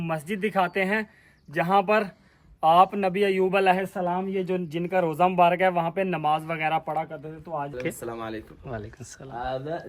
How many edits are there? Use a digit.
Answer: 1